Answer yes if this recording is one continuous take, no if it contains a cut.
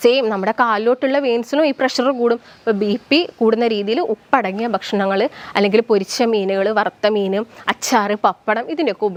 yes